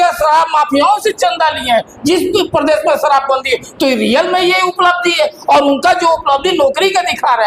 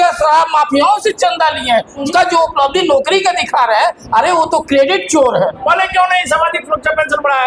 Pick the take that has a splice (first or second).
second